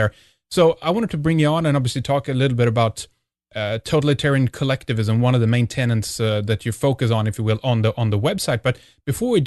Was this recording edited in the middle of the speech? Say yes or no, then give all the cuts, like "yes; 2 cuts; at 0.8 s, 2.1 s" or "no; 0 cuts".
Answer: no; 0 cuts